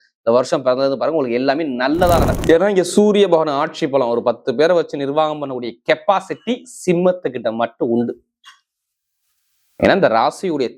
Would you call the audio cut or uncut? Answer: cut